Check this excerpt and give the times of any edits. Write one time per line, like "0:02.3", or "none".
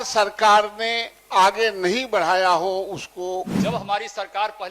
0:03.5